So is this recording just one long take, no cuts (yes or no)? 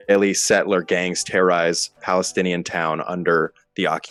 yes